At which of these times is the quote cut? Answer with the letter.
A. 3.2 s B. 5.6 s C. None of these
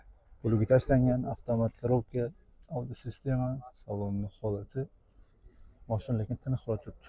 C